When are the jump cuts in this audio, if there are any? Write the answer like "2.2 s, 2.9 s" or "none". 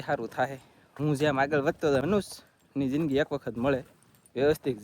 2.0 s